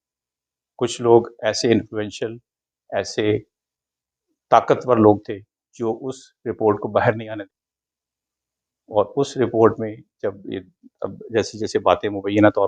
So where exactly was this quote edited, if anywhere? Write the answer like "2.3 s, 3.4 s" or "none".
7.3 s